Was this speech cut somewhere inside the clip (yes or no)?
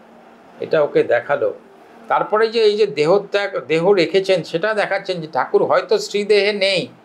no